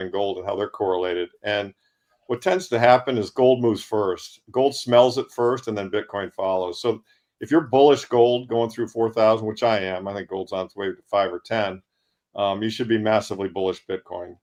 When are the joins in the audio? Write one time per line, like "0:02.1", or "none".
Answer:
none

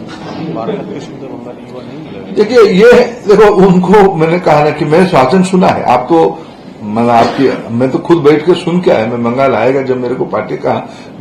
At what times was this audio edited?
none

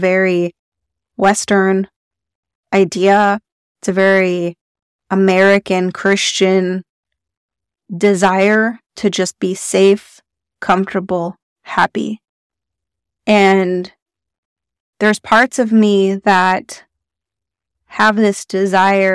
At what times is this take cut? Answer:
0:01.0

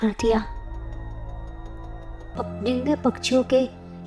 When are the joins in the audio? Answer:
0:02.2

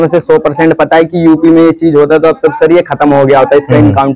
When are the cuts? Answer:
none

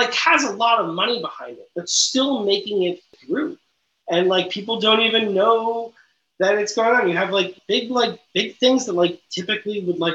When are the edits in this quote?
0:03.2
0:07.6

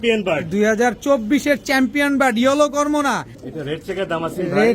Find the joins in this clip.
0:03.4

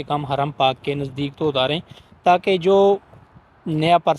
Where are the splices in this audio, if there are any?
none

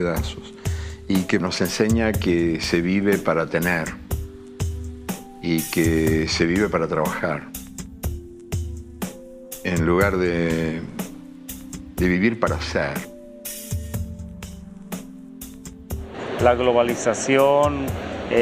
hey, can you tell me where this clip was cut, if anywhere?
0:01.4

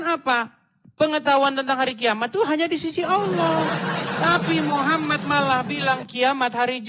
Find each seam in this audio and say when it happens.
none

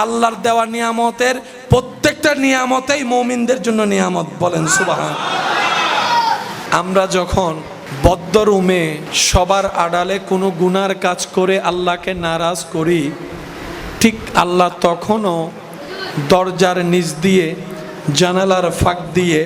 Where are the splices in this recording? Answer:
0:06.6

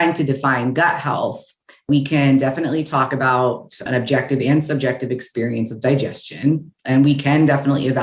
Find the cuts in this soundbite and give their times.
0:01.9

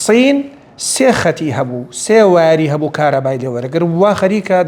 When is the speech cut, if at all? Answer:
none

